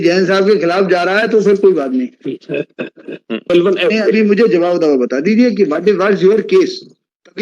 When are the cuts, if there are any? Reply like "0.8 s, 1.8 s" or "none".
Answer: 3.5 s